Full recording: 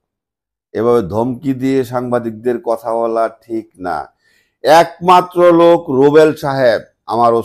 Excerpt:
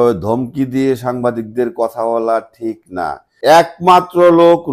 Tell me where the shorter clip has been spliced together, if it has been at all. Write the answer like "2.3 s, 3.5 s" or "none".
3.2 s